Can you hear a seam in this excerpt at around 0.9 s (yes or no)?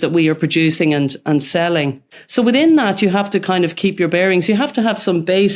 no